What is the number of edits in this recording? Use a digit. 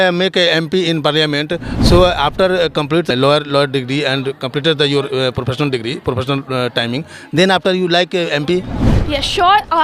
1